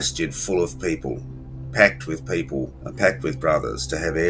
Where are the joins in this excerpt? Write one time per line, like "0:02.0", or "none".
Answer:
0:02.8